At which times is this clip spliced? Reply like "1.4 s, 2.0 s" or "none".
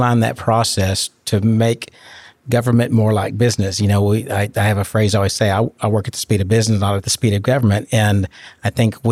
7.1 s